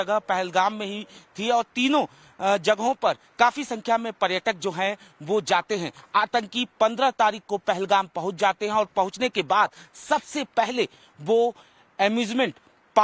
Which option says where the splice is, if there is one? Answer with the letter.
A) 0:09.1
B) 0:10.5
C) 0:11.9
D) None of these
A